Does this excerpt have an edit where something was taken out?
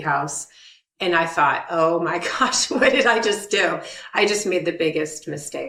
no; 0 cuts

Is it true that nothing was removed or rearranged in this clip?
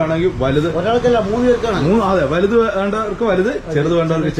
yes; 0 cuts

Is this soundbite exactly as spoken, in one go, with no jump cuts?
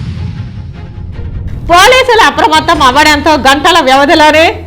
no; 1 cut; at 1.4 s

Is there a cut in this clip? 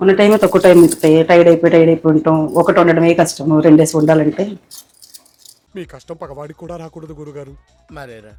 no; 0 cuts

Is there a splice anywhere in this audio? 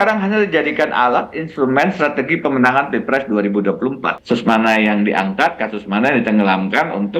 yes; 1 cut; at 4.1 s

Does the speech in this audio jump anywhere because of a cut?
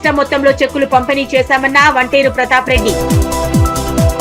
no; 0 cuts

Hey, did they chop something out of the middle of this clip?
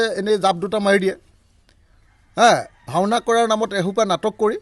no; 0 cuts

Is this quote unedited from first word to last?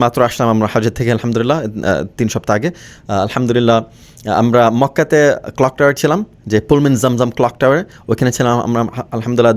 yes; 0 cuts

